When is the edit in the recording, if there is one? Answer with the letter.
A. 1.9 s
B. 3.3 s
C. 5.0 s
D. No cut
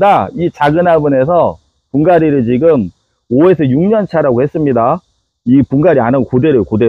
D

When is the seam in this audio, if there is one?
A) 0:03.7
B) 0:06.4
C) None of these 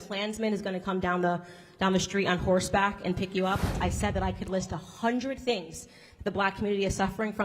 A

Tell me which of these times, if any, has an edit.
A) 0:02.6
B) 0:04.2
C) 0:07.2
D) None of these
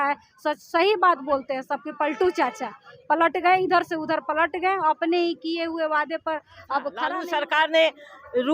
C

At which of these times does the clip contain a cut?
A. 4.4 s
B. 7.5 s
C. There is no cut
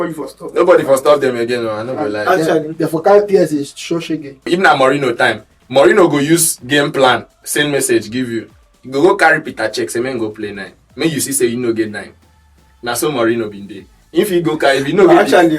A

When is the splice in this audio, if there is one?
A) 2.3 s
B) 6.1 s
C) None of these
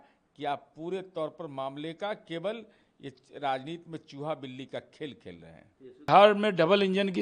B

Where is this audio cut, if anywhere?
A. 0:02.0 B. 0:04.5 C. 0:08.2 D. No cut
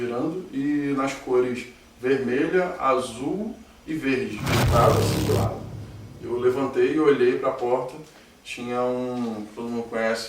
B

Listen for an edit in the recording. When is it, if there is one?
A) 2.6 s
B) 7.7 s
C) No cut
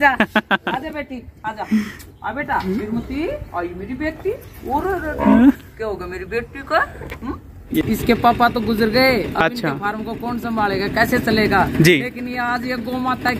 B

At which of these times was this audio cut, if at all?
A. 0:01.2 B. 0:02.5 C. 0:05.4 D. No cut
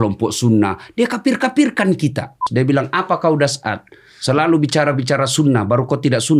B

